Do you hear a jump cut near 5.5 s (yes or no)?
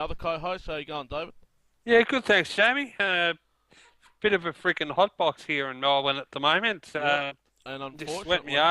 no